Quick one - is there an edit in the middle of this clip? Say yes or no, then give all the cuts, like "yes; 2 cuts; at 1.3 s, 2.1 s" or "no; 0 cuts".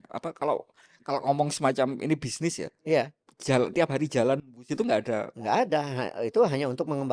no; 0 cuts